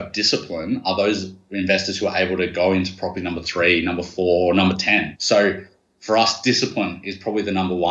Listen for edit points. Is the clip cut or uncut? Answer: cut